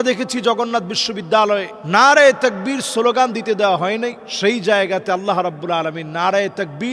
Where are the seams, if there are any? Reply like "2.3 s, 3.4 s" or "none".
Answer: none